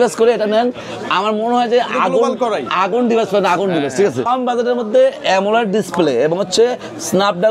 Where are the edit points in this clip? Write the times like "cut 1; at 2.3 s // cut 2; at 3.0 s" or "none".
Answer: cut 1; at 4.3 s